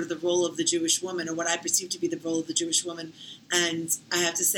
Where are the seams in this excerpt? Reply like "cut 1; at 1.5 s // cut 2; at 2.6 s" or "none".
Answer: cut 1; at 3.1 s